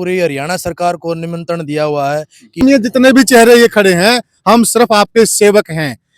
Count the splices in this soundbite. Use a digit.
1